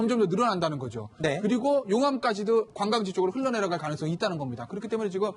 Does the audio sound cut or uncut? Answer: uncut